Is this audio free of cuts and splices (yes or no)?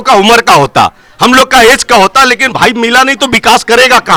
yes